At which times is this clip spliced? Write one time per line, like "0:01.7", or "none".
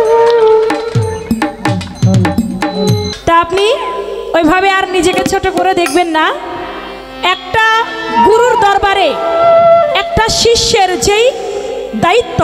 0:03.1